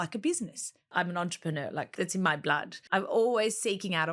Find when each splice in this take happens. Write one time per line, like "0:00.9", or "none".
0:00.9
0:01.9
0:02.7